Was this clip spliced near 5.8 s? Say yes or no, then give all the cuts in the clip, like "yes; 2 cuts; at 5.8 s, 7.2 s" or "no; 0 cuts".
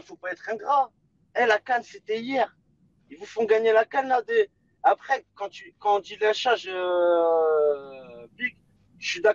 no; 0 cuts